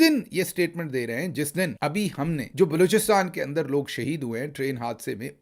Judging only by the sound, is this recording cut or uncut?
cut